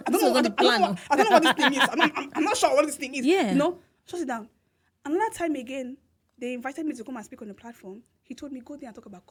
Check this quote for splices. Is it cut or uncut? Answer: uncut